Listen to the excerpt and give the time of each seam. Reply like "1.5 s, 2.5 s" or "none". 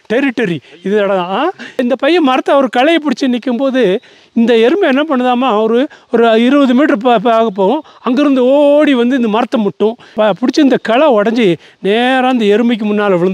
1.6 s, 10.1 s